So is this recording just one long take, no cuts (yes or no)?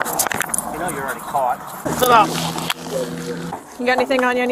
no